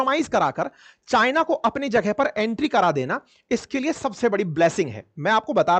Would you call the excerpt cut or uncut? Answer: uncut